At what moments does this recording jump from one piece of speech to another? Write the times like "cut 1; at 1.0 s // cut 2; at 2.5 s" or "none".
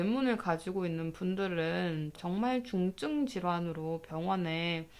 cut 1; at 2.1 s

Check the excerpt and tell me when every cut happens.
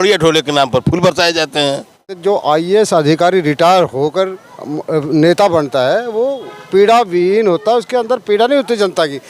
cut 1; at 2.1 s

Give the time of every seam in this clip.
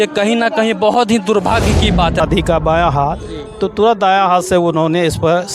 cut 1; at 2.2 s

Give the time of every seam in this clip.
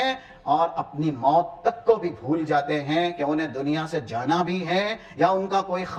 none

